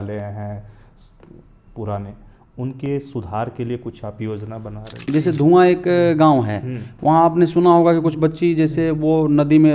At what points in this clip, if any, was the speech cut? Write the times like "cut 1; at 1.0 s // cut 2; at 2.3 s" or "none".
cut 1; at 5.1 s